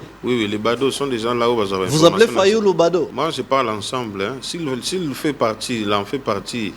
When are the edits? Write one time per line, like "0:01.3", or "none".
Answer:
0:03.1